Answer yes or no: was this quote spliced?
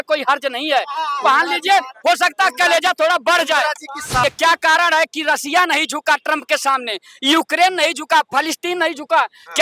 yes